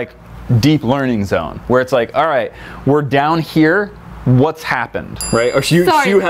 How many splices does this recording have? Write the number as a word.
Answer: one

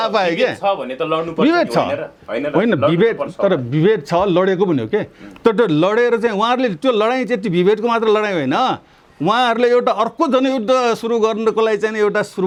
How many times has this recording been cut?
zero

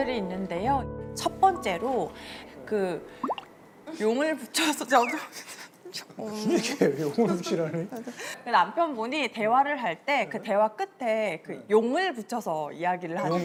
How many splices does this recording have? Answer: zero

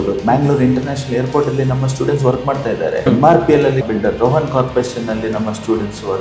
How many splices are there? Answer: two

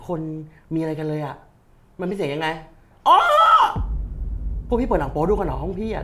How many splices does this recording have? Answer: zero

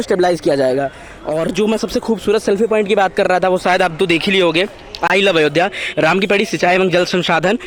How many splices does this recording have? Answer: zero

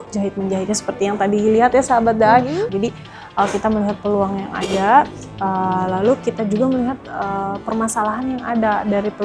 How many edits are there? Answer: one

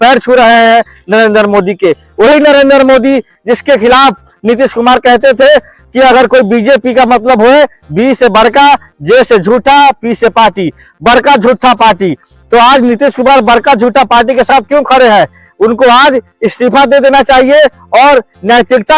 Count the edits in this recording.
zero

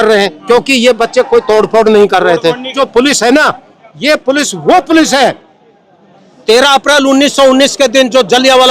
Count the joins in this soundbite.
one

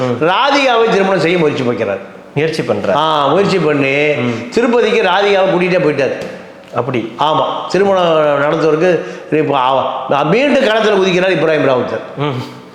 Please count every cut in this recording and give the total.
zero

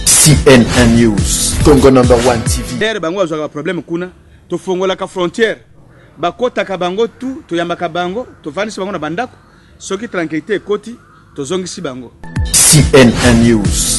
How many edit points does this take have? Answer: two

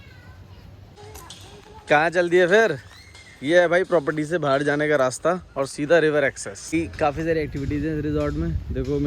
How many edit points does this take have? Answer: two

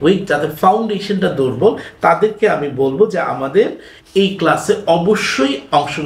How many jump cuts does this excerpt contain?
zero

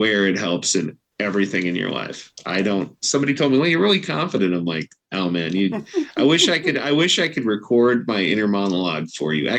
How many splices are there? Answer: zero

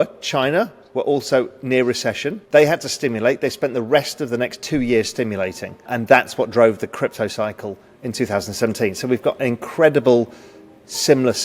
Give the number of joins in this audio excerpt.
two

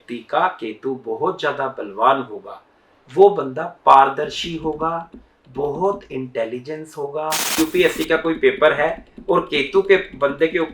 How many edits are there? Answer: one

